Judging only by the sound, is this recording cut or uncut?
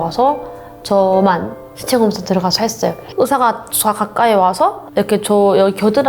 cut